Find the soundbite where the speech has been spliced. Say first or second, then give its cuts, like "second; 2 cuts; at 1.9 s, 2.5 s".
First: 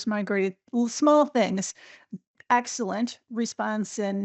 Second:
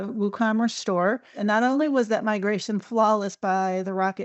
second; 1 cut; at 1.3 s